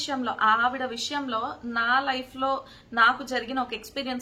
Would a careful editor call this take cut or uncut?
uncut